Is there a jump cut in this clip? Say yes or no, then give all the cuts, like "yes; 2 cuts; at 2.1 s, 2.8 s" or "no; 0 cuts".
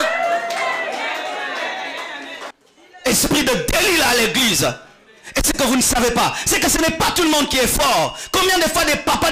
yes; 1 cut; at 2.6 s